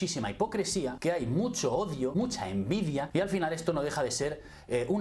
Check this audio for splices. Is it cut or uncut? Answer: cut